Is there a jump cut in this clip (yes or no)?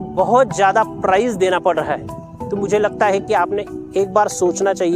no